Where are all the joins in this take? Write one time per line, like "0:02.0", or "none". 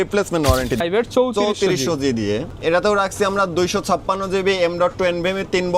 0:00.8
0:02.5